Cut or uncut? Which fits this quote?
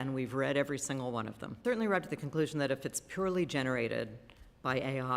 cut